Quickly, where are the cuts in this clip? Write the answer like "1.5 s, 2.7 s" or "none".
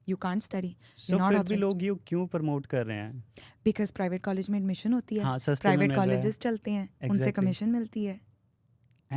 none